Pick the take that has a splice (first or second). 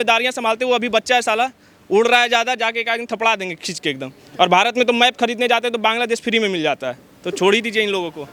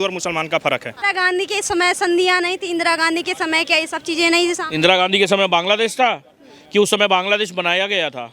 second